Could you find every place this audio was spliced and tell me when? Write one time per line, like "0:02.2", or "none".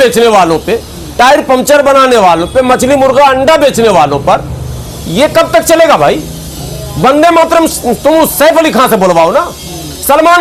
none